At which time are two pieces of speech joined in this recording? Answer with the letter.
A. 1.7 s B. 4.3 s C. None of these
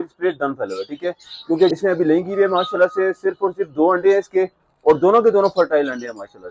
A